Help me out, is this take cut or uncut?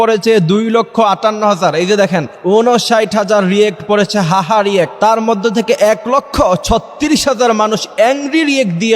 cut